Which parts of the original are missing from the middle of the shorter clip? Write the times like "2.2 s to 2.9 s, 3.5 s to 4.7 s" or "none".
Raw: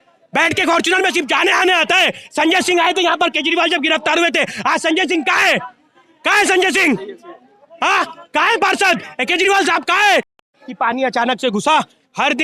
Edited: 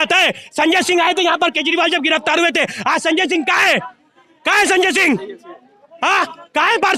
none

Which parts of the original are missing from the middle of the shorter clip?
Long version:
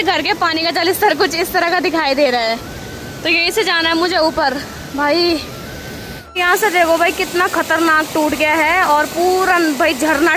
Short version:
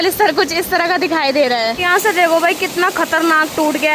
2.6 s to 6.4 s

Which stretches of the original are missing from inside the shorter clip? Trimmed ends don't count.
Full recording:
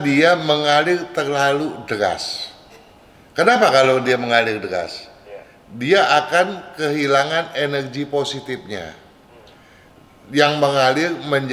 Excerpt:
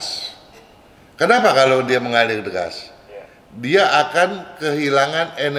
none

